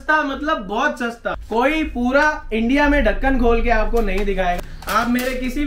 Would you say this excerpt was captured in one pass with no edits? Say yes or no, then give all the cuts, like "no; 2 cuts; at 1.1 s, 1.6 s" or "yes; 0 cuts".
no; 2 cuts; at 1.4 s, 4.6 s